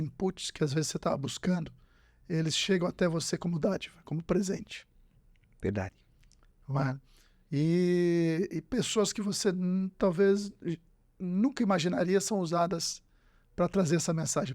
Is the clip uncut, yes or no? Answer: yes